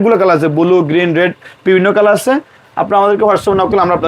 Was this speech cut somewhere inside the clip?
no; 0 cuts

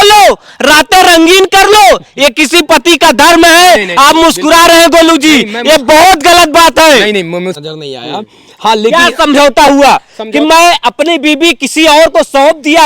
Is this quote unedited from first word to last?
no; 1 cut; at 7.6 s

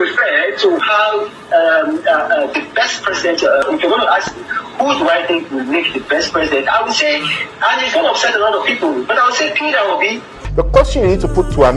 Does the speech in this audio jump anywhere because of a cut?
yes; 2 cuts; at 3.6 s, 10.4 s

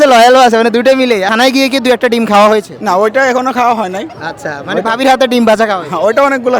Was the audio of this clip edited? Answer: yes; 1 cut; at 1.3 s

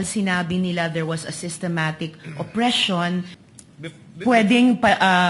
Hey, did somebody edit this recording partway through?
yes; 1 cut; at 3.4 s

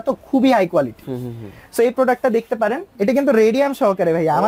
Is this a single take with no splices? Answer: no; 1 cut; at 2.9 s

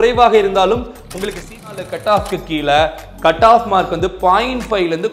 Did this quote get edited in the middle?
yes; 1 cut; at 1.7 s

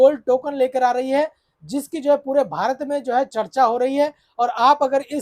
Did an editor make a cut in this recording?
no; 0 cuts

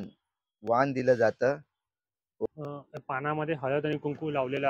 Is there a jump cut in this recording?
yes; 1 cut; at 2.5 s

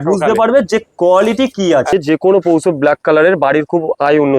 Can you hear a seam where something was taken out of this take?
yes; 1 cut; at 1.9 s

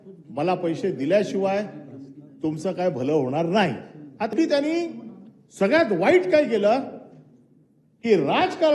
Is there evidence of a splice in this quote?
yes; 1 cut; at 4.3 s

